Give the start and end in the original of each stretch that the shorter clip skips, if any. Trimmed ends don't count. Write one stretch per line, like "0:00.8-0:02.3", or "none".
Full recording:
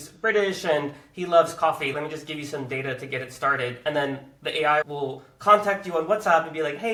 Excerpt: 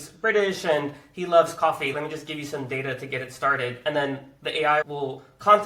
none